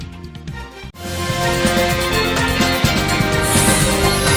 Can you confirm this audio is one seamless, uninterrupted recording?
no; 2 cuts; at 0.9 s, 3.6 s

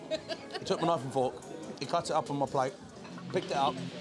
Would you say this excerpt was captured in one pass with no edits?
yes; 0 cuts

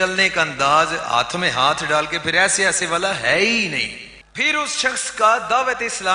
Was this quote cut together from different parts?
no; 0 cuts

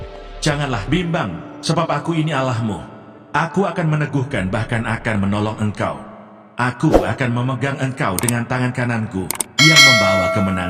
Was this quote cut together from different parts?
no; 0 cuts

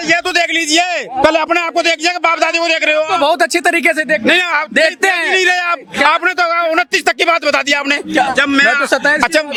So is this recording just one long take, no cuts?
yes; 0 cuts

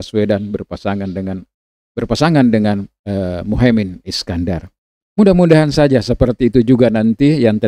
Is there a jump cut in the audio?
yes; 1 cut; at 1.5 s

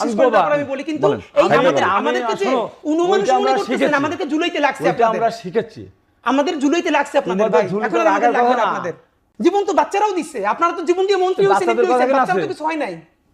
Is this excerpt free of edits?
no; 1 cut; at 9.2 s

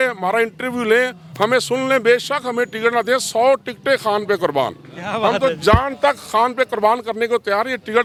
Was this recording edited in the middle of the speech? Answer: no; 0 cuts

